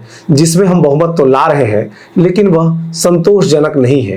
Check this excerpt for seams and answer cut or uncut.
uncut